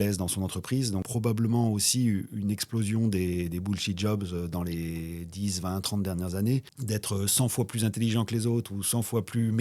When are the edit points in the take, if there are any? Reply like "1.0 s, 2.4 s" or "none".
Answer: 1.0 s, 6.7 s